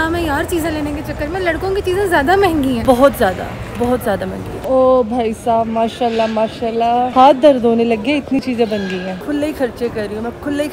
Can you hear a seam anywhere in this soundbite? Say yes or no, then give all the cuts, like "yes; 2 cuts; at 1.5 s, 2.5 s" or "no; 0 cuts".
no; 0 cuts